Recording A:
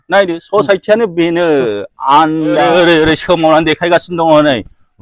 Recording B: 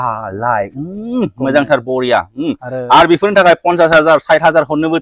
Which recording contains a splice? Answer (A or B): A